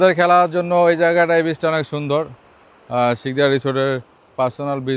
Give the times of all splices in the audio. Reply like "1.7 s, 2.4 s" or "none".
none